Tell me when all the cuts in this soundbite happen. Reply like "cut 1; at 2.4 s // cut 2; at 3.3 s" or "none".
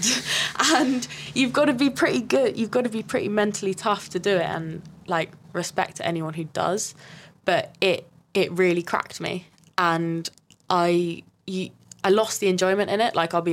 none

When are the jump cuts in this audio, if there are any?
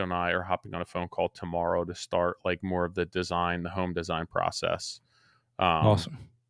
none

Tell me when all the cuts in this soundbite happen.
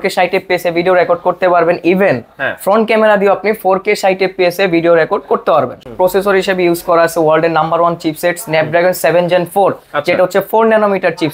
cut 1; at 5.8 s

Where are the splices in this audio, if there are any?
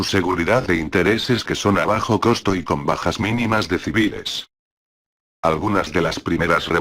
cut 1; at 3.2 s

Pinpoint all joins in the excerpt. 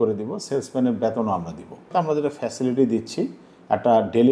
cut 1; at 1.9 s

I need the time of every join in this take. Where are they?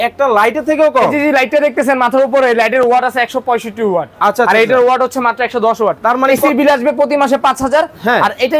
none

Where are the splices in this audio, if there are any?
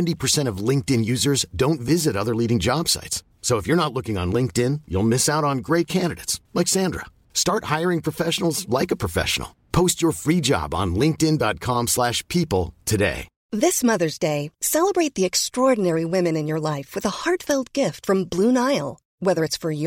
cut 1; at 13.3 s

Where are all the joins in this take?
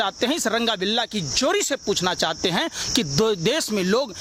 none

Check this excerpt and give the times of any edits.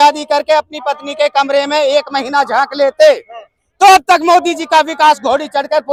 none

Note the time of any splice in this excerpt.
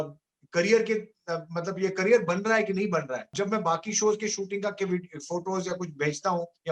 cut 1; at 3.3 s

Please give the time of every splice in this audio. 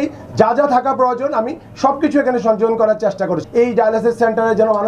cut 1; at 3.4 s

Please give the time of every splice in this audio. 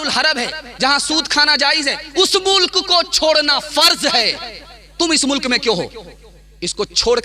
none

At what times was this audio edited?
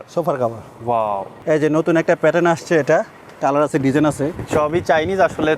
cut 1; at 1.3 s

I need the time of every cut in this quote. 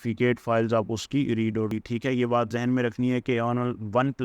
cut 1; at 1.7 s

